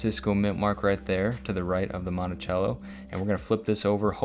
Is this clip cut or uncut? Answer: uncut